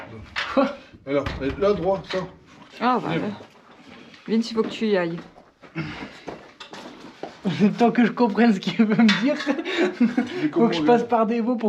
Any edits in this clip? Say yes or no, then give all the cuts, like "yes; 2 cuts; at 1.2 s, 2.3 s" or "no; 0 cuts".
no; 0 cuts